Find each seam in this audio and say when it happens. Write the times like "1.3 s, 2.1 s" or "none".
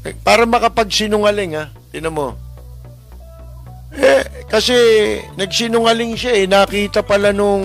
none